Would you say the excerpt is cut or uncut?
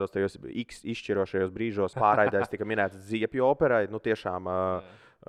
cut